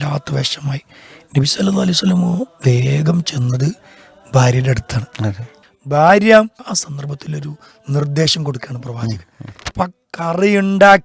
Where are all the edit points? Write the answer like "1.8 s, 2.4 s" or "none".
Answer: 5.6 s, 6.6 s, 9.6 s